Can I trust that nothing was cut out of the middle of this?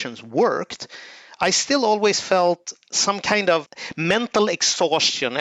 yes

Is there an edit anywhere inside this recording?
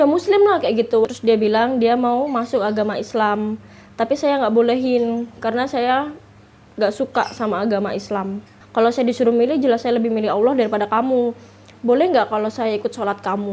yes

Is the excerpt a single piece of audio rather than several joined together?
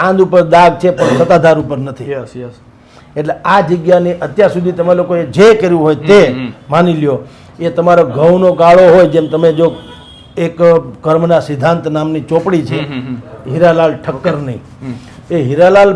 yes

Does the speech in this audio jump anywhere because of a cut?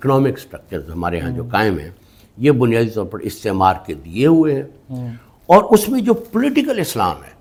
no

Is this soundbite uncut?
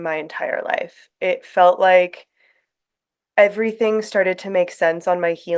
yes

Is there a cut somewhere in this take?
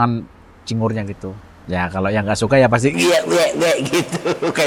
no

